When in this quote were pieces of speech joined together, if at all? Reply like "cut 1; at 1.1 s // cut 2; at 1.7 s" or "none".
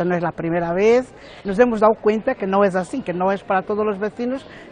cut 1; at 1.2 s